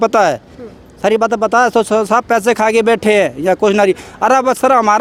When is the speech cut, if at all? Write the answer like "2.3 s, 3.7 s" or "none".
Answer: none